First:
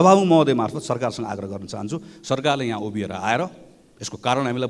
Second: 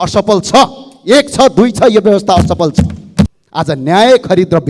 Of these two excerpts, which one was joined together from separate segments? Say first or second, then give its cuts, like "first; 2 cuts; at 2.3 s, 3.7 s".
second; 1 cut; at 3.4 s